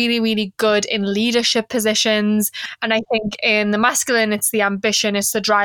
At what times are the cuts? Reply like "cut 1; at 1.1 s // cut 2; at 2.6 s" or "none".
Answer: cut 1; at 2.8 s